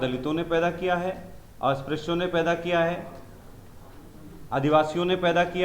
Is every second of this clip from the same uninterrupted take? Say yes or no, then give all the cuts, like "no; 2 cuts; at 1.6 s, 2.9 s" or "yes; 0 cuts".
yes; 0 cuts